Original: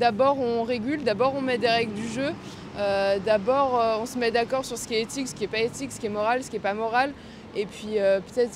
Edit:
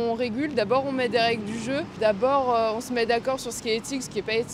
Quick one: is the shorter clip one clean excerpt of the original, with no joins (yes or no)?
no